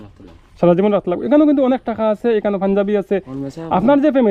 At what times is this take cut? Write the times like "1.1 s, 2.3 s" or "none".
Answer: 3.2 s